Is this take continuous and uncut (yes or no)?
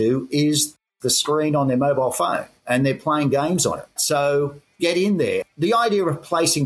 no